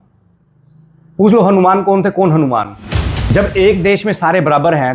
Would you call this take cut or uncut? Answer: cut